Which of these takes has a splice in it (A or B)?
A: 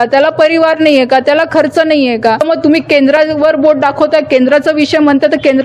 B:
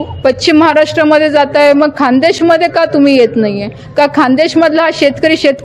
A